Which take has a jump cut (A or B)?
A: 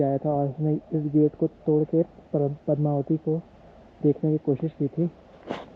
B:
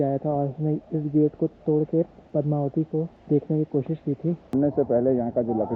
B